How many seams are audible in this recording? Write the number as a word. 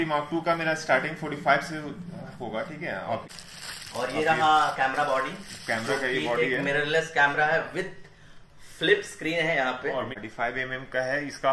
two